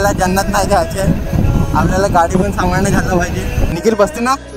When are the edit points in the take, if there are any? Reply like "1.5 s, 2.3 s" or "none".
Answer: 3.6 s